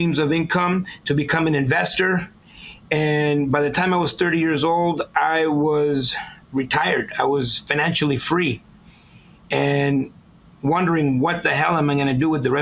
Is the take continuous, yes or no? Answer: yes